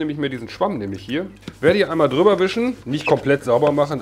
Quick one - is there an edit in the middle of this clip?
yes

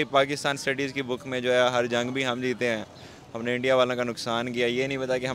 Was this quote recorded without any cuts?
yes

